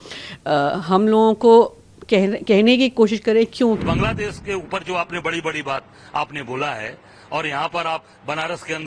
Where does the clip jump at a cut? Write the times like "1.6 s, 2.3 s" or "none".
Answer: 3.8 s